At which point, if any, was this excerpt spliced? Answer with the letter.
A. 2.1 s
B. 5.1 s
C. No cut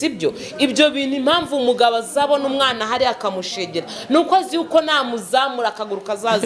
C